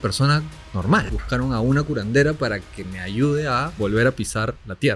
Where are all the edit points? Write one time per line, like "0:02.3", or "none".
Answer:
0:01.0
0:03.7